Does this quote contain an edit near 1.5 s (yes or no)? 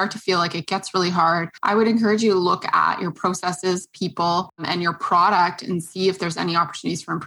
yes